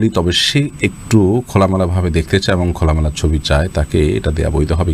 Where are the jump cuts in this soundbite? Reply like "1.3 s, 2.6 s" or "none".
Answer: none